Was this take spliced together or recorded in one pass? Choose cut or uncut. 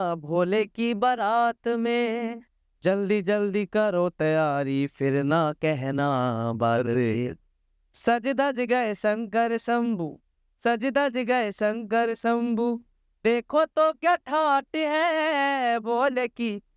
uncut